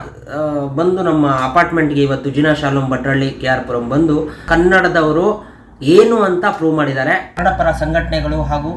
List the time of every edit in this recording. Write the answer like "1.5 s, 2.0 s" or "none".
4.4 s, 7.3 s